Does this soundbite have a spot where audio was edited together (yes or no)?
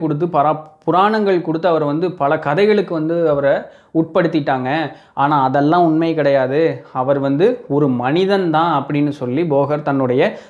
no